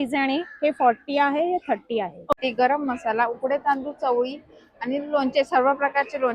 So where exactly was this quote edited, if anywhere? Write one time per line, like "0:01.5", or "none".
0:02.3